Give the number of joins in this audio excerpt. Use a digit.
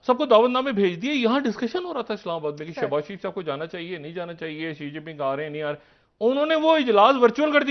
0